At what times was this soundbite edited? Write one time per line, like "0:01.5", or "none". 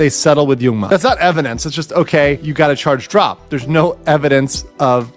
0:00.8
0:02.4